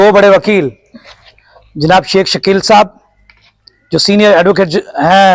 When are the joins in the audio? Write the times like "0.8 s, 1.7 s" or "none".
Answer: none